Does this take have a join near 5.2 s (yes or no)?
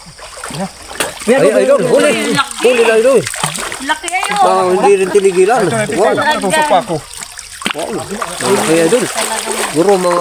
yes